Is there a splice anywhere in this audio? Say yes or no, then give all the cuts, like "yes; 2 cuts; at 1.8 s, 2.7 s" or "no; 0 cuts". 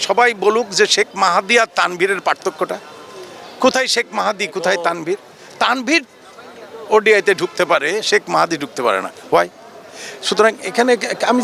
no; 0 cuts